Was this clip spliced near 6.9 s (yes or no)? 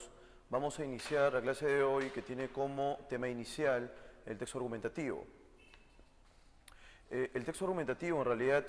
yes